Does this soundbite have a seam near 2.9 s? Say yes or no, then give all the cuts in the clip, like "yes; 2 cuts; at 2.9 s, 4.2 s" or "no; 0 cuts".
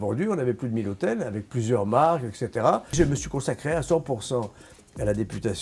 yes; 1 cut; at 2.9 s